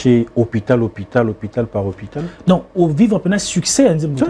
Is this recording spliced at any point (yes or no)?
no